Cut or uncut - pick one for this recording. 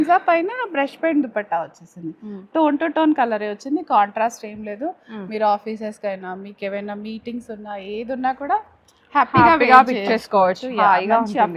uncut